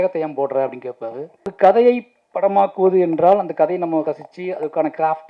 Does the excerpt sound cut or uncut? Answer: cut